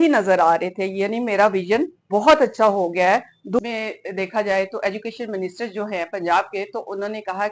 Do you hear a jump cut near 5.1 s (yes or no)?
no